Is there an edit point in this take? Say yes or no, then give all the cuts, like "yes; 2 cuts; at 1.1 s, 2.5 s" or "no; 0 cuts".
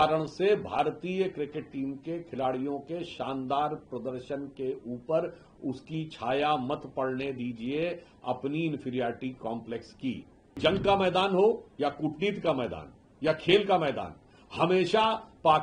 yes; 1 cut; at 10.6 s